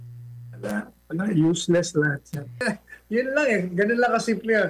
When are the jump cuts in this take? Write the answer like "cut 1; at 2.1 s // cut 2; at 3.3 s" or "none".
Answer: cut 1; at 2.7 s